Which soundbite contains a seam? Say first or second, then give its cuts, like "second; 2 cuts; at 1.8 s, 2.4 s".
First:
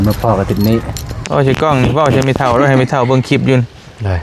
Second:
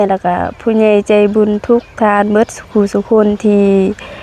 first; 1 cut; at 1.2 s